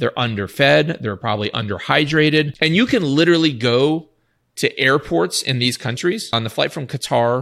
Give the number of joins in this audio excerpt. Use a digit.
2